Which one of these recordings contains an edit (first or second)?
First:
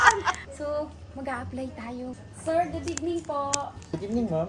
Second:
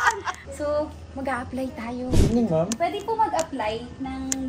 second